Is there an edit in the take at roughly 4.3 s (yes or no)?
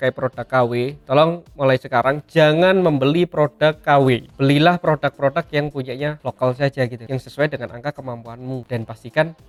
no